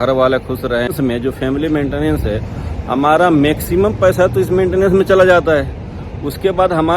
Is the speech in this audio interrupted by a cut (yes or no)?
yes